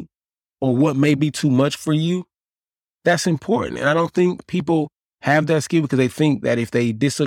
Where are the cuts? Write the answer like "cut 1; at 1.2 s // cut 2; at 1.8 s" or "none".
none